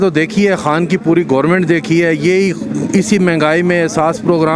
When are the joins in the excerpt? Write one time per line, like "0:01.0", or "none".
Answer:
none